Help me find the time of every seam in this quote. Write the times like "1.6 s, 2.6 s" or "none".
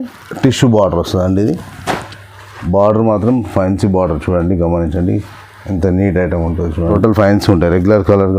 6.8 s